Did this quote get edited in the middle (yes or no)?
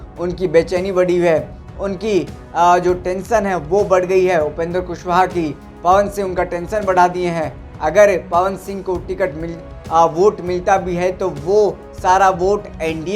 no